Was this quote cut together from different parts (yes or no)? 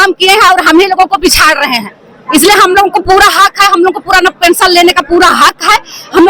no